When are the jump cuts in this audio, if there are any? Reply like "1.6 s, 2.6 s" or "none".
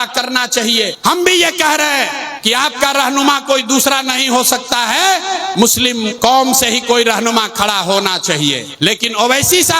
0.9 s, 2.3 s, 5.6 s, 8.7 s